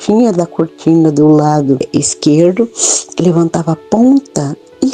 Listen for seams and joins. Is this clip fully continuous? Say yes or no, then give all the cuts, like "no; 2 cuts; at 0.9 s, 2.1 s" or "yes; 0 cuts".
no; 1 cut; at 1.9 s